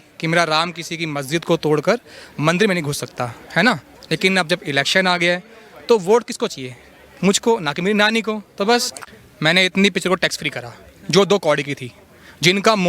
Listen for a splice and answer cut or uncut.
cut